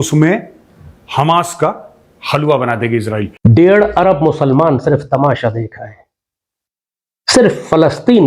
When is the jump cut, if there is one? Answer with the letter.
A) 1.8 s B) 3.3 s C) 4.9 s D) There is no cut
B